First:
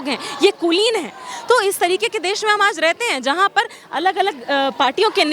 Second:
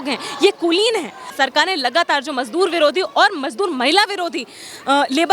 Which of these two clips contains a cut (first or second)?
second